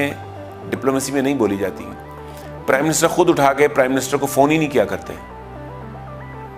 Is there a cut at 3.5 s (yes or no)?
no